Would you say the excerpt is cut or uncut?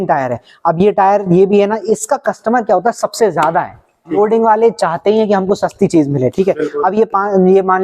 cut